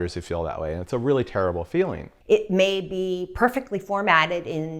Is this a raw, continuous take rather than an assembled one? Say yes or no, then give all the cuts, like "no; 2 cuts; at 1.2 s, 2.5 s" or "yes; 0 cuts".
no; 1 cut; at 2.1 s